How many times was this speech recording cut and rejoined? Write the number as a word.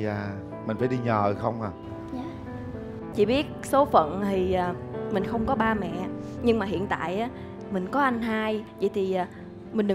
one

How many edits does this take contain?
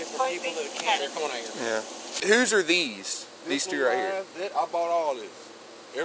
one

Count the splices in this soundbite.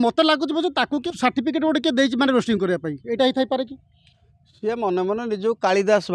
one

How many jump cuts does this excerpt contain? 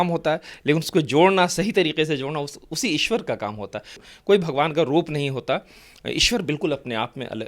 one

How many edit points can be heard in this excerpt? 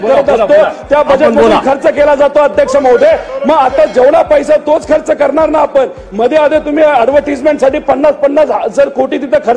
zero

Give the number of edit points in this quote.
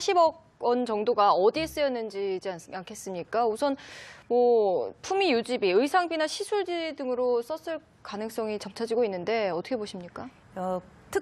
zero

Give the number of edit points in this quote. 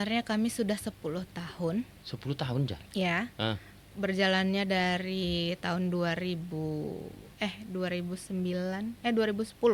zero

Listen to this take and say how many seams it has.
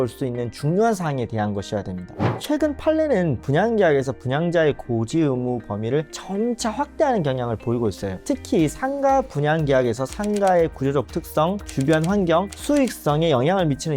one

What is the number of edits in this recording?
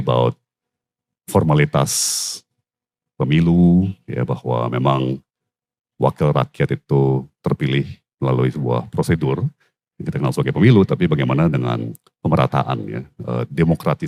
zero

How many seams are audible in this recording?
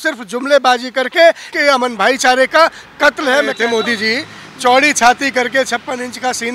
two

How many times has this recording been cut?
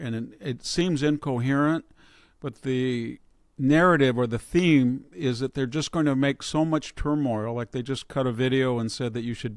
zero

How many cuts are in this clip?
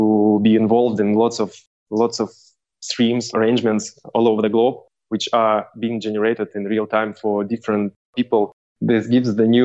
two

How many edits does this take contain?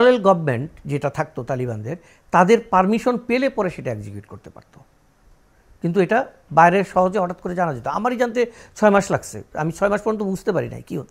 zero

